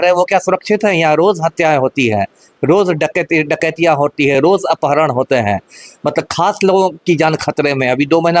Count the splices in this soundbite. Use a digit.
0